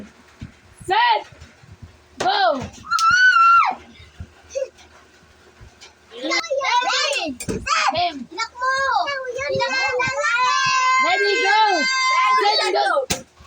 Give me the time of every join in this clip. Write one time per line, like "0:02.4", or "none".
0:06.4